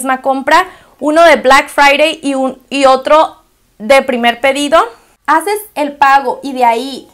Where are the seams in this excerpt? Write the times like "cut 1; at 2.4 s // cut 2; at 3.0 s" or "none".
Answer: cut 1; at 4.8 s